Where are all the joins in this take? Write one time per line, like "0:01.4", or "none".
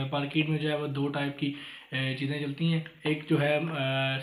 none